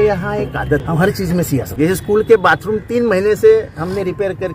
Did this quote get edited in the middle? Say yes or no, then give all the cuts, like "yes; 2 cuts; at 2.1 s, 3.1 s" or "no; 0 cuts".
yes; 2 cuts; at 0.8 s, 1.7 s